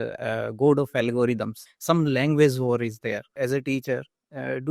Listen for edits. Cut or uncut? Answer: cut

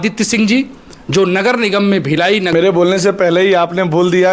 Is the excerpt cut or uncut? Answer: cut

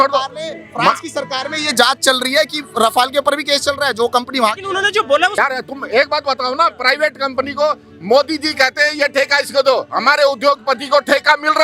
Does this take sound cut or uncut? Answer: cut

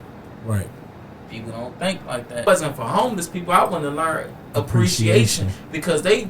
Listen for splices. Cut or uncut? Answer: cut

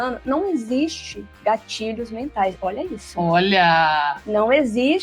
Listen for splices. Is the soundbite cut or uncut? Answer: uncut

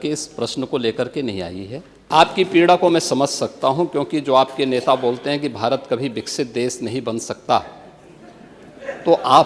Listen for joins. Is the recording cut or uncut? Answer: cut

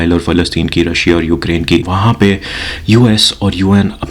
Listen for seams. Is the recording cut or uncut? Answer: cut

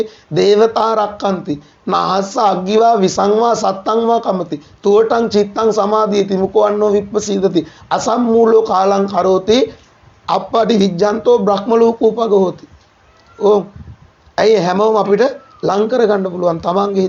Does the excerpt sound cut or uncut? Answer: uncut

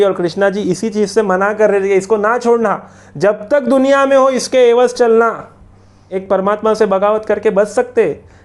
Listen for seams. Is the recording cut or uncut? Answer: cut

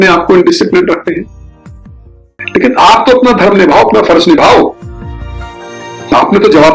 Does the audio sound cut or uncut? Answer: cut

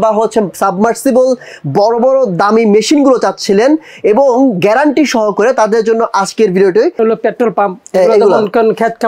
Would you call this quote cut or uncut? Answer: cut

